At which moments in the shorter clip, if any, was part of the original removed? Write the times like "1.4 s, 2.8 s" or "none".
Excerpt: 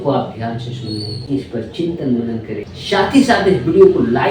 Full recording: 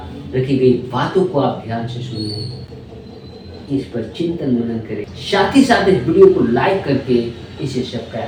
1.1 s